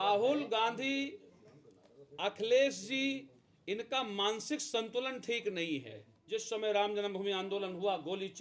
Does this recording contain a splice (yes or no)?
yes